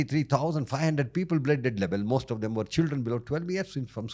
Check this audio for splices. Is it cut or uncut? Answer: uncut